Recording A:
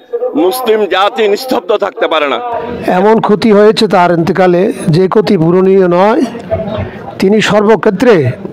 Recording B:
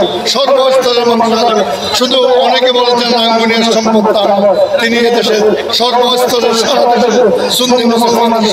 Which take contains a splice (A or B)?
A